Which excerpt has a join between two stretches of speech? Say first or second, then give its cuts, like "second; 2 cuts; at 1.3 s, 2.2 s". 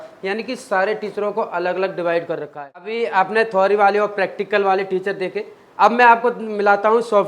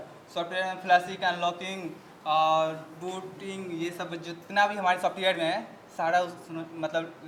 first; 1 cut; at 2.9 s